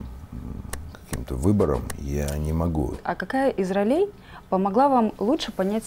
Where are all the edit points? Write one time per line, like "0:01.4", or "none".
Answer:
0:03.1

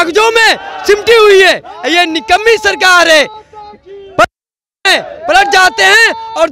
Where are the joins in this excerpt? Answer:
none

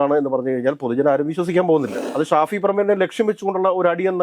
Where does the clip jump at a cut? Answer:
0:02.0

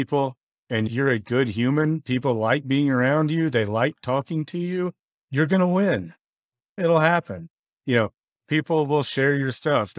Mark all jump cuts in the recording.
none

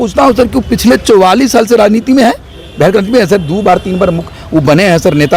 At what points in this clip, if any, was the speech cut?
none

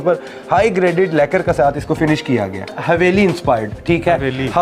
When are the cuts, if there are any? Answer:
0:02.7

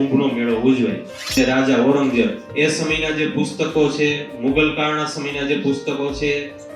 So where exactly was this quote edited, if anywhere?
0:01.3

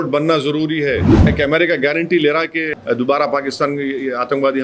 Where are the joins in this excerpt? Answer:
0:01.3
0:02.7

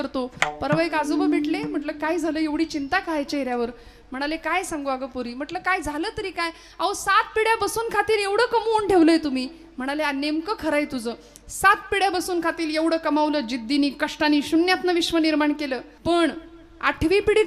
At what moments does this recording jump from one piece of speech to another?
0:15.9

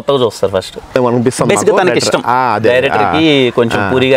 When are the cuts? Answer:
0:00.9

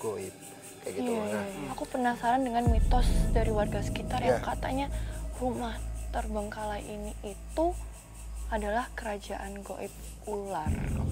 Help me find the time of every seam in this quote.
0:01.6

